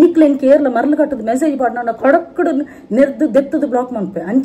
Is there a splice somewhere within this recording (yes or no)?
no